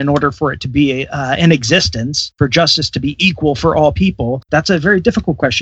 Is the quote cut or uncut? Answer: uncut